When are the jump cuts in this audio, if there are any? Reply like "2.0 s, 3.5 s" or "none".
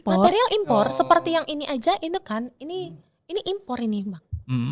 none